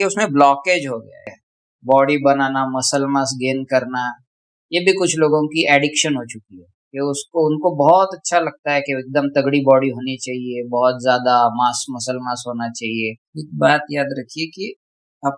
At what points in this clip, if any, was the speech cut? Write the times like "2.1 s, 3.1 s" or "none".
1.2 s, 13.3 s